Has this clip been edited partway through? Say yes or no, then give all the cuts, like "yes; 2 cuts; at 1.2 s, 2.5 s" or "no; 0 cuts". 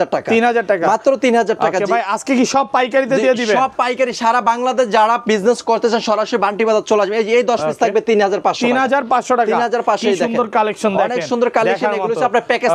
no; 0 cuts